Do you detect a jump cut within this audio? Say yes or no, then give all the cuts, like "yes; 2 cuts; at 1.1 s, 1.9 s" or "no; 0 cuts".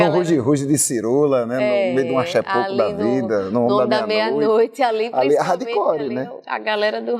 no; 0 cuts